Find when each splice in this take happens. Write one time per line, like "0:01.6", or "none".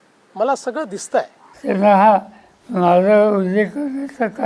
0:01.4